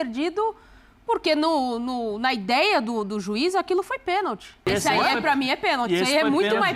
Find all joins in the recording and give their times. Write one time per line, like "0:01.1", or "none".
0:04.6